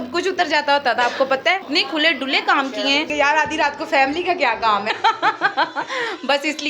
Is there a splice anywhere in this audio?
yes; 3 cuts; at 1.7 s, 3.1 s, 4.9 s

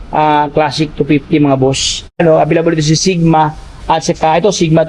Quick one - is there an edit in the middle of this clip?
yes; 1 cut; at 2.2 s

